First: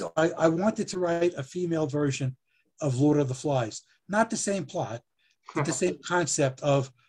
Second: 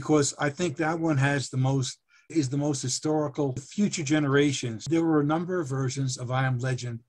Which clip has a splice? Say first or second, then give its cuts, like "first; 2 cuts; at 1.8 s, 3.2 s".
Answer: second; 3 cuts; at 2.3 s, 3.7 s, 4.8 s